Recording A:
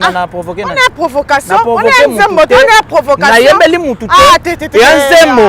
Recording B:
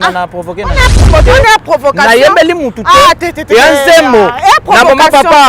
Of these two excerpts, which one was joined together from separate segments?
B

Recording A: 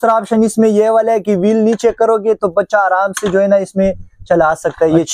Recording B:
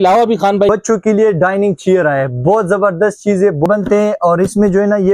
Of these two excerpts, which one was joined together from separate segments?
B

